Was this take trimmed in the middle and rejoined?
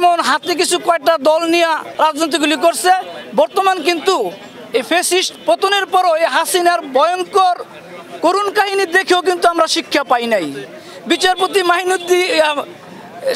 yes; 1 cut; at 1.9 s

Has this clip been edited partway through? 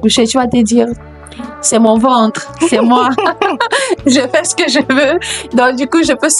no; 0 cuts

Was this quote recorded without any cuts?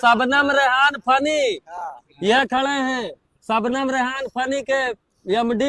yes; 0 cuts

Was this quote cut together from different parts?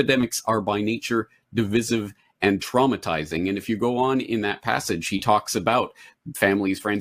no; 0 cuts

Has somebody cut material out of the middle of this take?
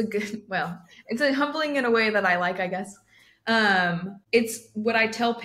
yes; 1 cut; at 4.1 s

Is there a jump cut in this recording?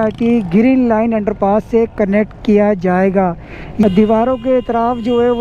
yes; 1 cut; at 3.8 s

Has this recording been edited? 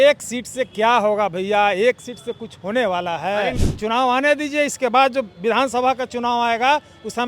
yes; 1 cut; at 3.6 s

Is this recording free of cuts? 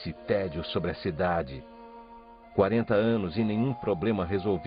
yes; 0 cuts

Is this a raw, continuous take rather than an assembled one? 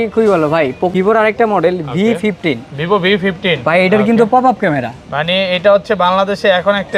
no; 1 cut; at 0.9 s

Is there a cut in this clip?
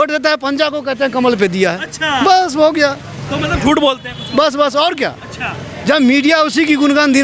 no; 0 cuts

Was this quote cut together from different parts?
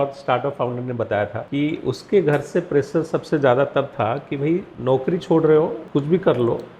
yes; 3 cuts; at 1.4 s, 4.7 s, 5.8 s

